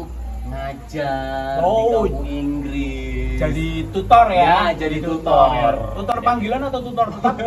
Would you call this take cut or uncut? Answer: uncut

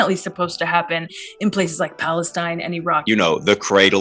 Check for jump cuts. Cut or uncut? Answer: cut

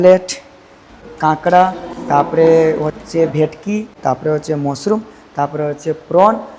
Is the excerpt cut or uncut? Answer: cut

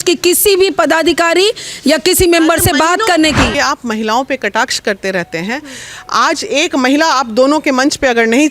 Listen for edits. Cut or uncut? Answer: cut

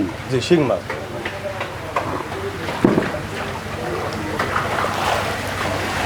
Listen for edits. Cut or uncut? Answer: uncut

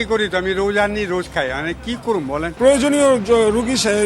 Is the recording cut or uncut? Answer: cut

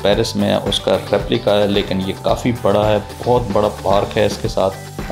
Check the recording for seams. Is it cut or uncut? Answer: uncut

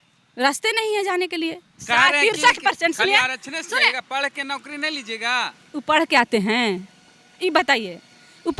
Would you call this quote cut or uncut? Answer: cut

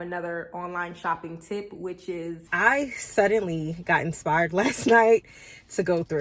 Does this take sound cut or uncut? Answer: cut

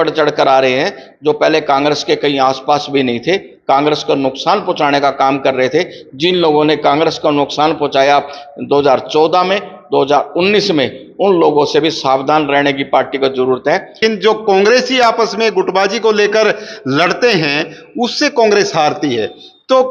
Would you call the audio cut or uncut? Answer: cut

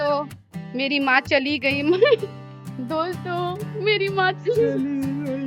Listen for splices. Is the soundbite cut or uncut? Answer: uncut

